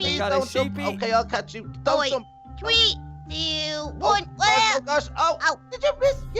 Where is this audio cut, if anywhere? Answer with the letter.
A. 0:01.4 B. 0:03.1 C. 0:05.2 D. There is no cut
A